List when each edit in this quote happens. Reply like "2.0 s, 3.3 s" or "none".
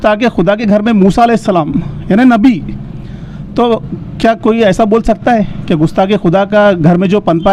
none